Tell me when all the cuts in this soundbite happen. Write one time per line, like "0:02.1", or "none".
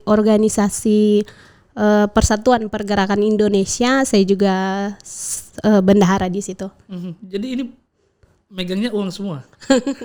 none

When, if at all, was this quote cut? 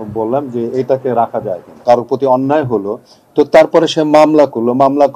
0:01.7

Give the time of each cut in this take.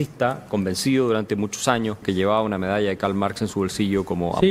0:02.0

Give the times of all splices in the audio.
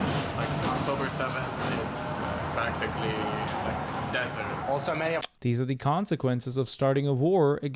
none

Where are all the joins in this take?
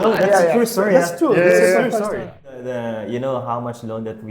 0:02.3

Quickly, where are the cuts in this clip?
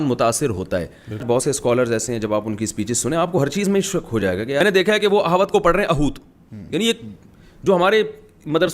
0:01.2
0:04.6

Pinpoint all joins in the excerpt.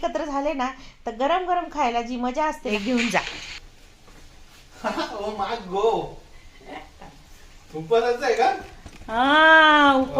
0:02.7

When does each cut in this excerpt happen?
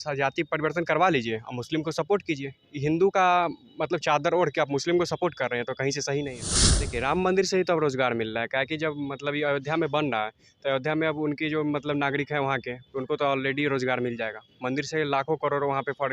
0:06.9

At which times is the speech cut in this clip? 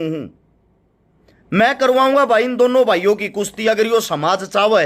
none

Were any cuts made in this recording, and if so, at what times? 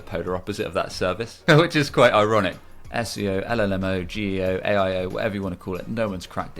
0:01.3
0:02.6

